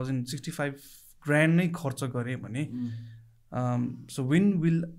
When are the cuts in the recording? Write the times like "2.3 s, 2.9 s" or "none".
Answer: none

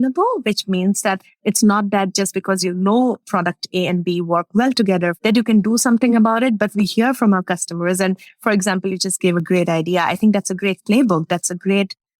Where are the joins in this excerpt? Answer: 3.2 s, 5.2 s

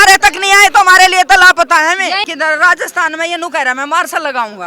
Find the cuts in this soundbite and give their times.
2.3 s

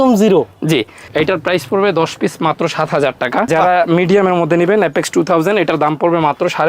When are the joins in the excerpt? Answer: 1.0 s, 3.5 s

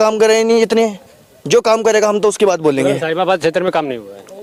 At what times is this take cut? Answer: none

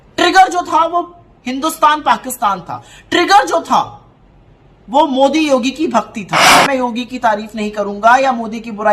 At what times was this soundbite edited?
6.5 s

